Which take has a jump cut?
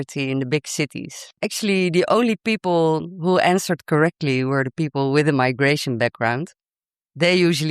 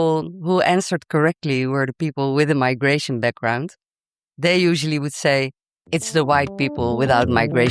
first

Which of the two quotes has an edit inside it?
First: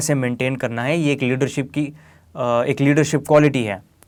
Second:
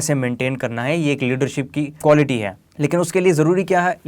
second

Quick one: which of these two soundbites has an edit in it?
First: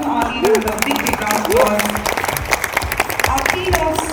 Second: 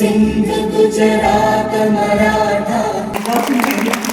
second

